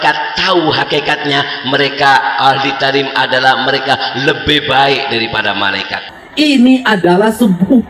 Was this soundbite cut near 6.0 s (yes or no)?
yes